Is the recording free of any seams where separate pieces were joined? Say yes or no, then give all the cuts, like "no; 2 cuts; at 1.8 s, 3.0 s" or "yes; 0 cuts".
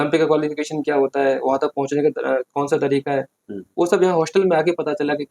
yes; 0 cuts